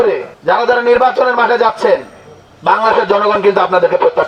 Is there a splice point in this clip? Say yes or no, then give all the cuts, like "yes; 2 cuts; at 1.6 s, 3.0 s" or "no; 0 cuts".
no; 0 cuts